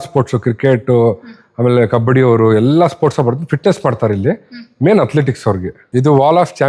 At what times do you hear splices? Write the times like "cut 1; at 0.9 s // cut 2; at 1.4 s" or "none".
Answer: cut 1; at 5.7 s